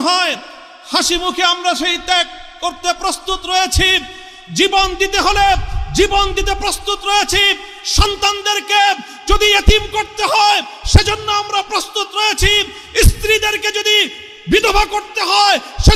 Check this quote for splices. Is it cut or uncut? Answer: uncut